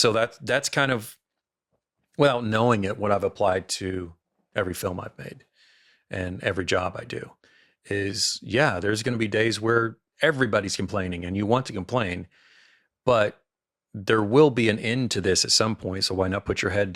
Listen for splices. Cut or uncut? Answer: uncut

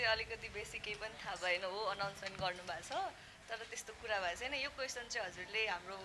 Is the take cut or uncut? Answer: uncut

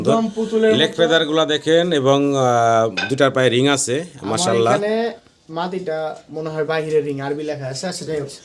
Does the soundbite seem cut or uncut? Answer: uncut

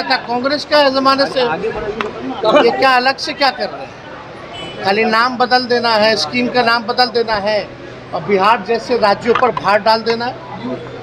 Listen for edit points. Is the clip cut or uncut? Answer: uncut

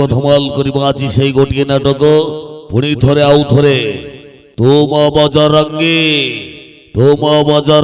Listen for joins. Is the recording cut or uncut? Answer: uncut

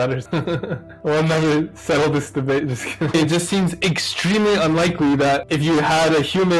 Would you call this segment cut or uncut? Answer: cut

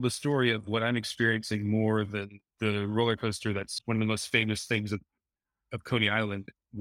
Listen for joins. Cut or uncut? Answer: cut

